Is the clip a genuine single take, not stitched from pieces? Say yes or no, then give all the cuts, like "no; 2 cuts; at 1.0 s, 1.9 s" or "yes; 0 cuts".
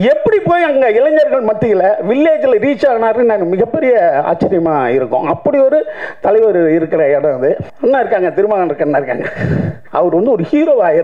no; 2 cuts; at 7.7 s, 9.8 s